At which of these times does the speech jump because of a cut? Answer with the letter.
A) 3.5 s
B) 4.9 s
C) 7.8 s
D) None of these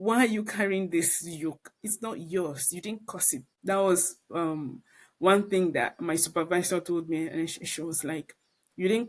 A